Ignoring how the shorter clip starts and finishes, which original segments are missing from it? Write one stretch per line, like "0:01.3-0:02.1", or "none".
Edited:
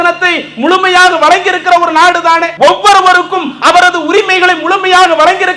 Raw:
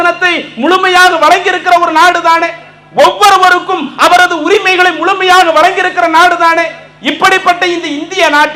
0:02.5-0:02.9